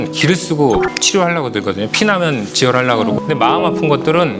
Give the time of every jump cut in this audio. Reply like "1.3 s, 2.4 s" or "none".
none